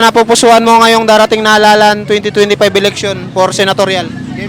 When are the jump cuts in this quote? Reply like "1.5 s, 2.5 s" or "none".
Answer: none